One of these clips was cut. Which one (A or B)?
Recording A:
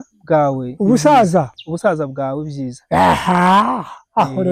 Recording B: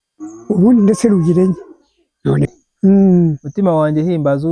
B